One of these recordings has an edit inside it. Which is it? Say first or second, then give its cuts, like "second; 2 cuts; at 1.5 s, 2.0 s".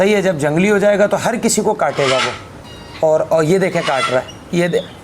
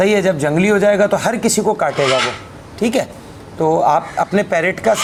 first; 1 cut; at 2.6 s